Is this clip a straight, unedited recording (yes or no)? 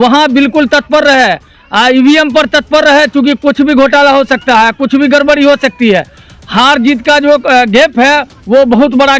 yes